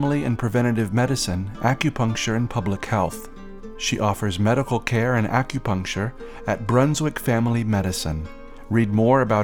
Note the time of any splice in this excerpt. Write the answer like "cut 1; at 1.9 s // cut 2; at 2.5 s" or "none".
none